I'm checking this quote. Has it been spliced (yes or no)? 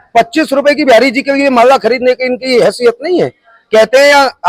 no